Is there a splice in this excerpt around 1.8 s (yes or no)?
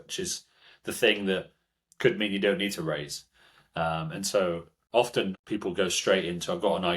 no